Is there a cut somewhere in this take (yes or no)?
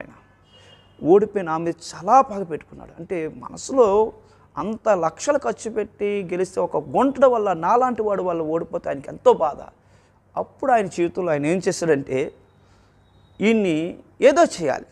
no